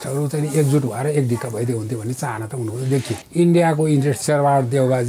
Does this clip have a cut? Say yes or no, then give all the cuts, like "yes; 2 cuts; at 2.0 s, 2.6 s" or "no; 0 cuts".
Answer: yes; 2 cuts; at 3.2 s, 4.2 s